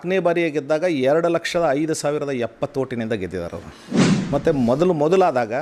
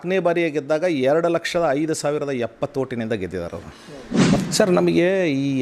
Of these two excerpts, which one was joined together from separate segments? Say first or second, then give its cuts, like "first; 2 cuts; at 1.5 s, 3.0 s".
second; 1 cut; at 3.9 s